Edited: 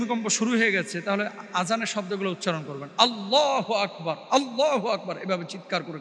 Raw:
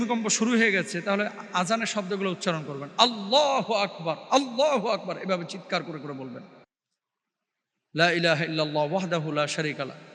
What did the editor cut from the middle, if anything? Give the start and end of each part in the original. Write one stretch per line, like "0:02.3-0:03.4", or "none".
none